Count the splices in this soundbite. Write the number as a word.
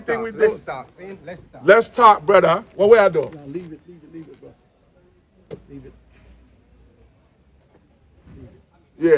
zero